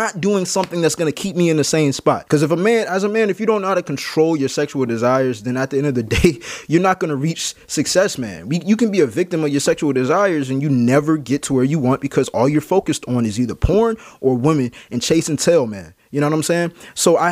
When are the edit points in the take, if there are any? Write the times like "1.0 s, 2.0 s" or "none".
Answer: 2.2 s

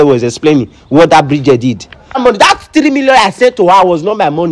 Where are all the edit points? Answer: 2.2 s

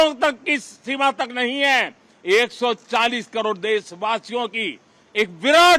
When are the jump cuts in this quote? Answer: none

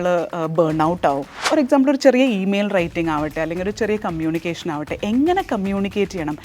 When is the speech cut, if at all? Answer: 1.3 s

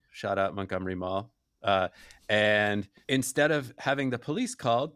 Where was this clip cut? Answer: 2.9 s

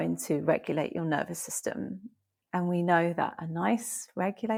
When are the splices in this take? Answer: none

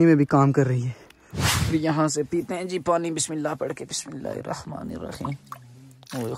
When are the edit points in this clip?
1.4 s

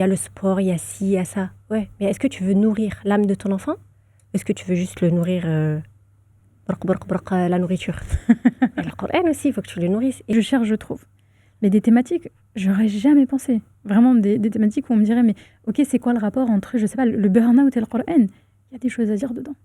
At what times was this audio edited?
10.2 s

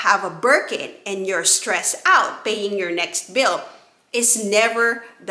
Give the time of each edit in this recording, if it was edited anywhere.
none

